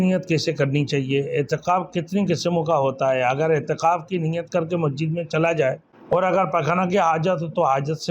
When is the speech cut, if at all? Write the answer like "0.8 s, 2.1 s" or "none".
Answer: 5.9 s